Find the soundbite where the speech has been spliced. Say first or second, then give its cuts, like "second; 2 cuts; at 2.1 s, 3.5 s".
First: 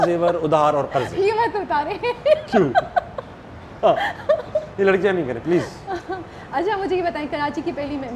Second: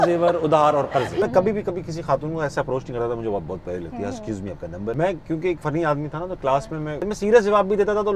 second; 4 cuts; at 1.2 s, 4.9 s, 5.6 s, 7.1 s